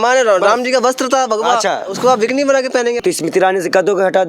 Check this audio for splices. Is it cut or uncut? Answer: cut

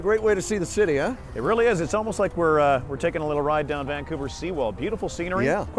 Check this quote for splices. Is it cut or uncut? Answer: uncut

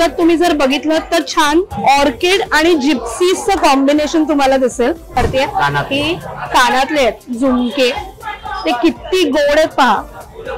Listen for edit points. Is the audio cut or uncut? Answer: cut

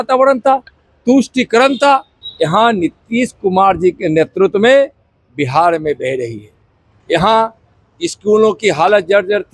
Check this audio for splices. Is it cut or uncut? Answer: cut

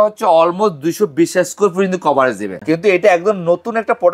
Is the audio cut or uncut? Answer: cut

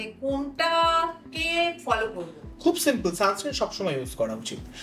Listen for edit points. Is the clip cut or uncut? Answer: uncut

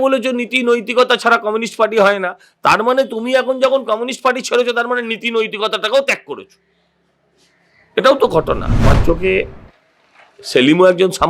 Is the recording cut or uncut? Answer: cut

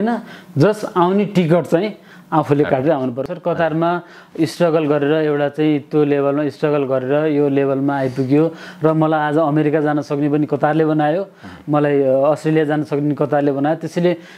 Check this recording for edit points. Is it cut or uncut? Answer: cut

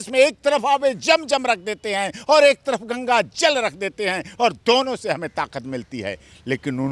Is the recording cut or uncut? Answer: uncut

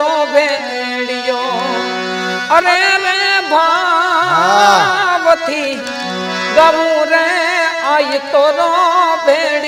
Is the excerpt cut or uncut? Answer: uncut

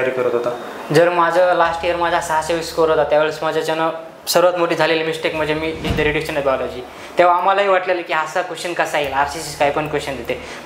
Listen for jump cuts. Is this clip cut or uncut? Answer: cut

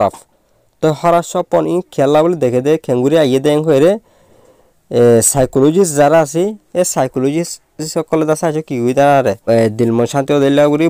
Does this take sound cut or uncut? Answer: cut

